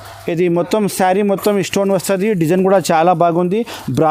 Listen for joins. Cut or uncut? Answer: uncut